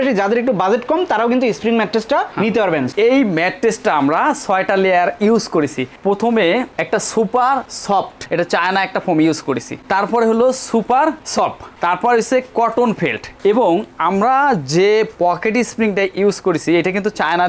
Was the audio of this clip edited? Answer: yes; 2 cuts; at 2.9 s, 8.2 s

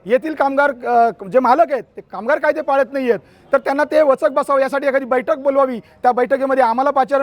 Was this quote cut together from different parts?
no; 0 cuts

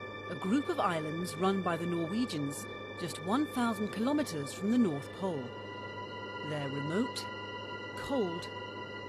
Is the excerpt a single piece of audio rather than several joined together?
no; 1 cut; at 6.7 s

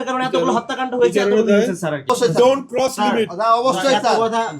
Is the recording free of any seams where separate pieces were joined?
no; 1 cut; at 2.1 s

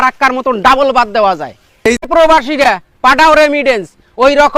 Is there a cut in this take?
yes; 1 cut; at 2.1 s

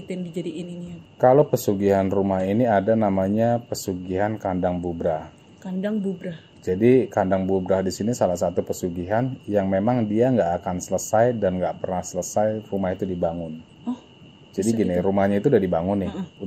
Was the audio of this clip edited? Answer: no; 0 cuts

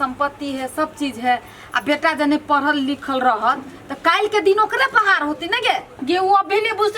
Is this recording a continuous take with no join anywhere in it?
yes; 0 cuts

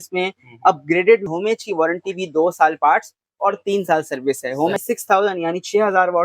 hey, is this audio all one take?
no; 2 cuts; at 1.2 s, 4.8 s

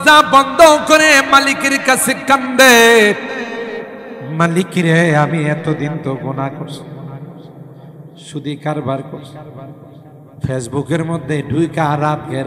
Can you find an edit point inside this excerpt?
no; 0 cuts

